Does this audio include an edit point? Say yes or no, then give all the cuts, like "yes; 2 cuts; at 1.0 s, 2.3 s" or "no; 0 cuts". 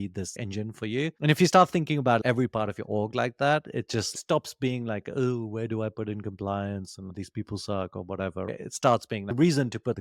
no; 0 cuts